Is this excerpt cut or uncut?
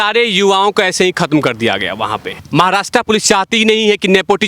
cut